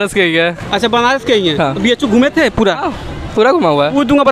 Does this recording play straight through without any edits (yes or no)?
yes